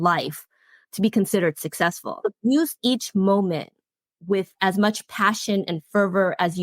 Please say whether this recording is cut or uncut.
cut